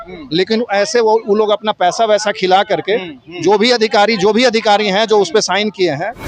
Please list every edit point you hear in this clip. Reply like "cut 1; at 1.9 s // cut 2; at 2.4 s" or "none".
none